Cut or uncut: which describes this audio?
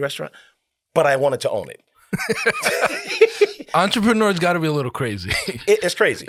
uncut